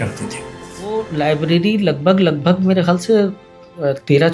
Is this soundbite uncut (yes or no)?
no